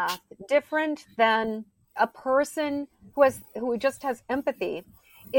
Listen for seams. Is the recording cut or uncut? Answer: cut